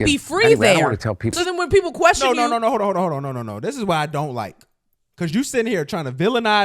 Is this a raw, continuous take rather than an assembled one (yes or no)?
no